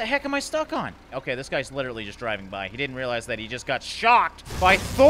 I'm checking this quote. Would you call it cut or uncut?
cut